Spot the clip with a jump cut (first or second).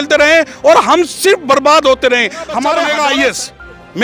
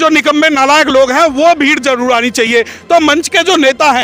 first